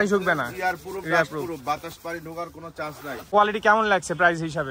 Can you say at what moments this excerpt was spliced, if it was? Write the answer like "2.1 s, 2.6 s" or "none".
3.3 s

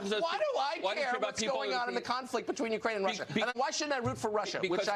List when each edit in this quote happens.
3.5 s

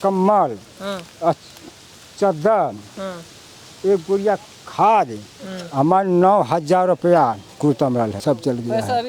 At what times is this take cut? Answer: 8.2 s

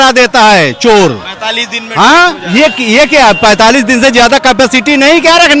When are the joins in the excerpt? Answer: none

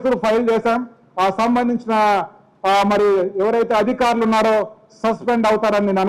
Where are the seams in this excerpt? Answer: none

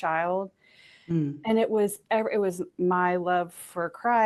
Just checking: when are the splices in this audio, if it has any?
none

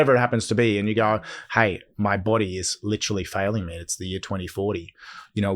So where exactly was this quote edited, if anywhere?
1.9 s

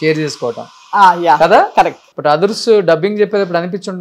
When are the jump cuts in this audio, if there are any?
2.1 s

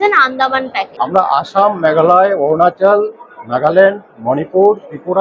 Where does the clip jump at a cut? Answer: 1.0 s

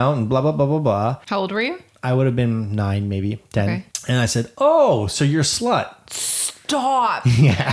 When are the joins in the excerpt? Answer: 1.2 s, 3.9 s

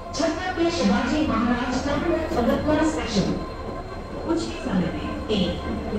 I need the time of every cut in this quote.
none

